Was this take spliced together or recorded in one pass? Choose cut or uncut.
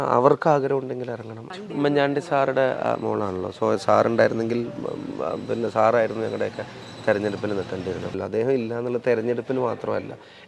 cut